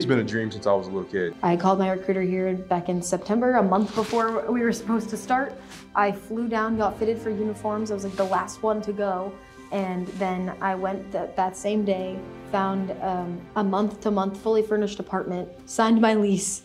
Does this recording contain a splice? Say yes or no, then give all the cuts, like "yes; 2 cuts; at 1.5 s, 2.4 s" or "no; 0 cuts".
yes; 1 cut; at 1.3 s